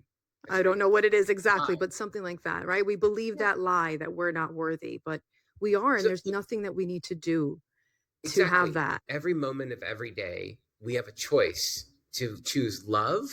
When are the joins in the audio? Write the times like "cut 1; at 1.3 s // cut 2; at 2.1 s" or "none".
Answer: cut 1; at 8.9 s